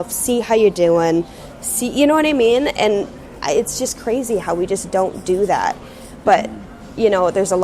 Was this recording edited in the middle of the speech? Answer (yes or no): no